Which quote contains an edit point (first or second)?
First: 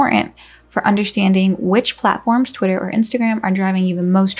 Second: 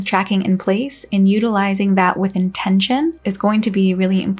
second